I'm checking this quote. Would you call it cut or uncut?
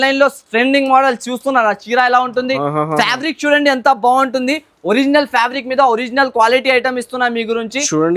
uncut